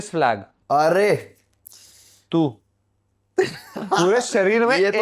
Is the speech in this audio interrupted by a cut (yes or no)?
yes